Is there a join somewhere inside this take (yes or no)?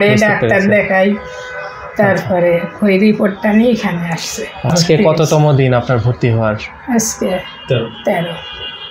yes